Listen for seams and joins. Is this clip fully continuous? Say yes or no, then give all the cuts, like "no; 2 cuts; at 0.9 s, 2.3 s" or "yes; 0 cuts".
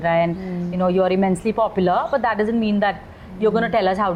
yes; 0 cuts